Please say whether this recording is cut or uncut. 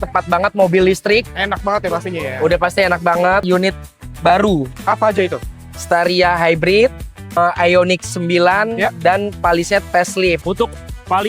cut